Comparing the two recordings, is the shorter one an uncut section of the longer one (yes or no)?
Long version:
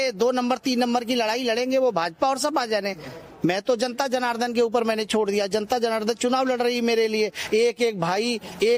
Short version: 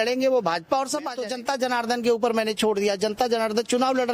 no